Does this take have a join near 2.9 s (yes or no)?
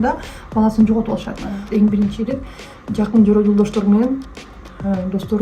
no